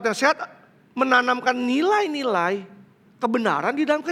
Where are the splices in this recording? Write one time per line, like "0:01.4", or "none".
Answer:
none